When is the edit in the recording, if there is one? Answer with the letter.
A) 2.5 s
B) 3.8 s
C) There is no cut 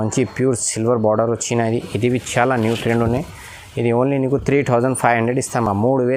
C